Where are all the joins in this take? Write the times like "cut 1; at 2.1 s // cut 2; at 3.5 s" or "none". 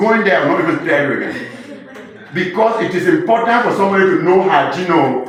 none